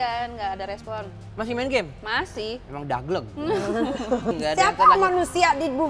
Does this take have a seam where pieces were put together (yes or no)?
yes